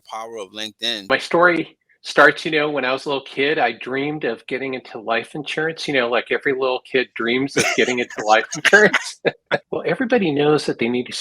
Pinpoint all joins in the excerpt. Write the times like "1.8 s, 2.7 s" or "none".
1.1 s, 9.6 s

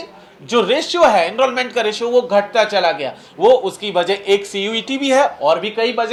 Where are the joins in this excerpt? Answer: none

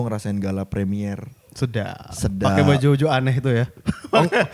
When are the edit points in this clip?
none

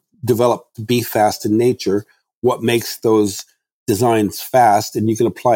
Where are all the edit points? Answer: none

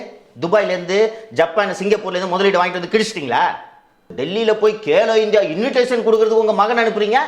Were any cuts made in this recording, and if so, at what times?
4.0 s

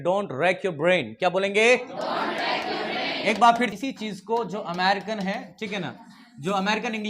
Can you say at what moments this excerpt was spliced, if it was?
3.7 s

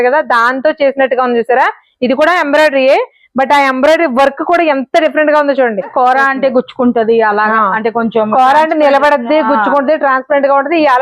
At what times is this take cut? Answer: 5.9 s

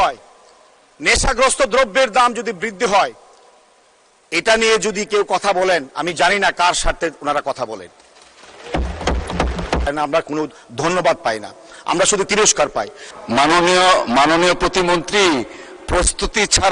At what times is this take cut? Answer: 9.9 s, 13.0 s

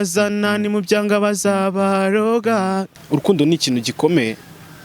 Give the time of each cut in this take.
2.9 s

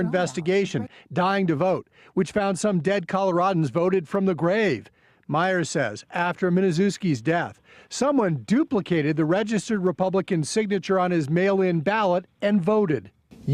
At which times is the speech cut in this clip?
3.6 s

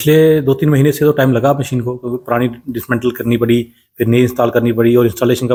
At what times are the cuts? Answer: none

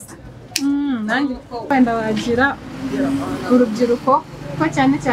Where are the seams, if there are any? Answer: 1.7 s

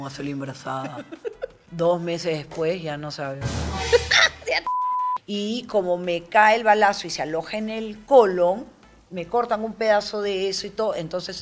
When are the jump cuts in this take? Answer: 1.6 s, 4.7 s

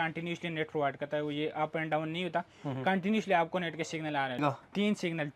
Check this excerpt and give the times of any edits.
4.4 s

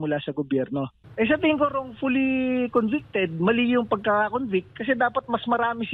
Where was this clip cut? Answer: 1.0 s

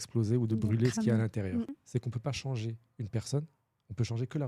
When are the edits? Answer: 1.8 s

